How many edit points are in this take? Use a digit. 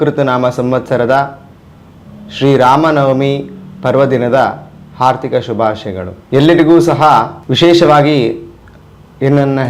2